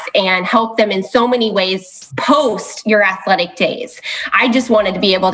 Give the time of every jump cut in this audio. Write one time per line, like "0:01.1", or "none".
0:02.0